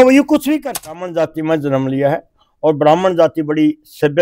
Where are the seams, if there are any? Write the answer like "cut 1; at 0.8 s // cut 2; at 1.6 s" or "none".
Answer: cut 1; at 0.9 s